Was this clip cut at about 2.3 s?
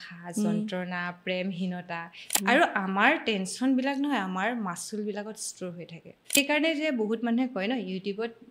yes; 2 cuts; at 2.3 s, 6.4 s

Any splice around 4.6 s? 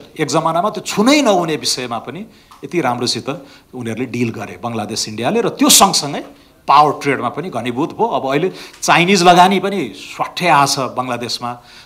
no; 0 cuts

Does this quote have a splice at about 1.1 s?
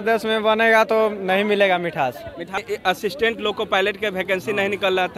no; 1 cut; at 2.6 s

